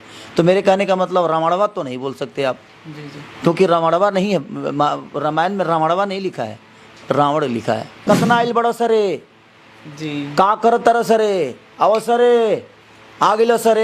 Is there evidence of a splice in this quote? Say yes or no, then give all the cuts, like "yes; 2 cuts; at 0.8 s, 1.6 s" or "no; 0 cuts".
yes; 1 cut; at 7.9 s